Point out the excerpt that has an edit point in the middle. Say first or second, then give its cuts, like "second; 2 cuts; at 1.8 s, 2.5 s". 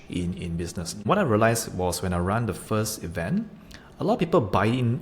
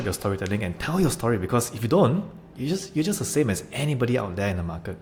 first; 1 cut; at 1.1 s